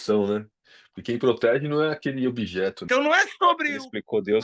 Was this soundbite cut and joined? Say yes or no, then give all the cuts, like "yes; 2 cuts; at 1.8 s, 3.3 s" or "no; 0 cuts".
yes; 1 cut; at 2.8 s